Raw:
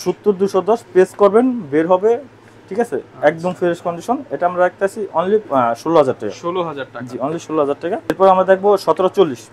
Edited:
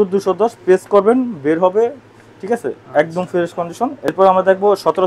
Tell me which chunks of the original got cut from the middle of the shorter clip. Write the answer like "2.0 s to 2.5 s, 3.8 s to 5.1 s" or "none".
4.3 s to 8.0 s

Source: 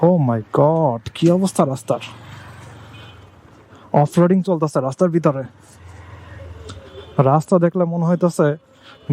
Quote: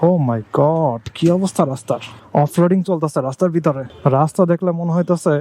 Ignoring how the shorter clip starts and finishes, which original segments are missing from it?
2.1 s to 3.7 s, 5.5 s to 7.0 s

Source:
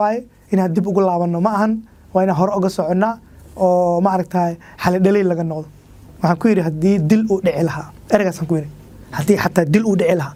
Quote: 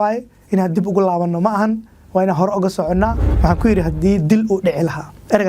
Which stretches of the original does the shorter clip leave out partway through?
3.3 s to 6.1 s

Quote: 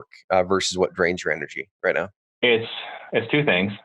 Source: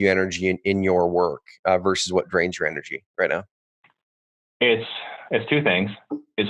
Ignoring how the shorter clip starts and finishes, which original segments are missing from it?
3.6 s to 4.4 s

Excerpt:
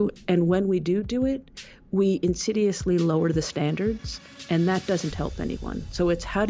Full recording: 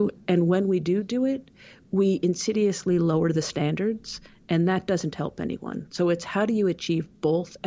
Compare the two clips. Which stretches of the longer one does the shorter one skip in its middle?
none

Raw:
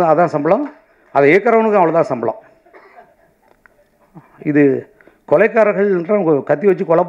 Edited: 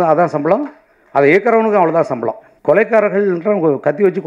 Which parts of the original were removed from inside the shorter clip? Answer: 2.5 s to 5.1 s

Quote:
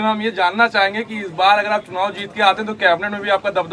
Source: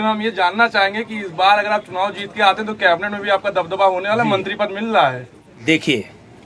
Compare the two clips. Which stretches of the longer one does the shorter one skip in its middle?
none

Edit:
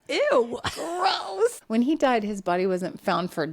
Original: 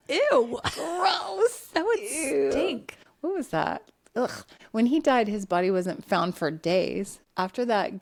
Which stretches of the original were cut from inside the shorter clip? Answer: 1.6 s to 4.6 s

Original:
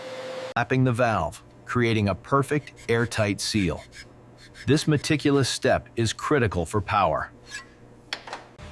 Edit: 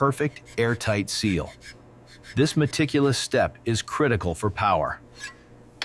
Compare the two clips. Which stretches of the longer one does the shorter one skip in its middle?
none

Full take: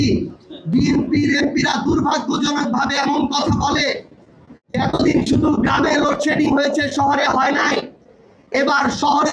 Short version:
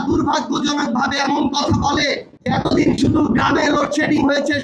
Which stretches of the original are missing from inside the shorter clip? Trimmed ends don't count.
4.1 s to 4.6 s

